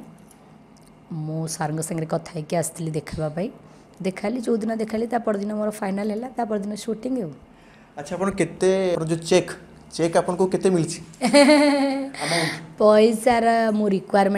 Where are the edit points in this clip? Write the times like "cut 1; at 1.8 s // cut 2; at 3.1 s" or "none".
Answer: none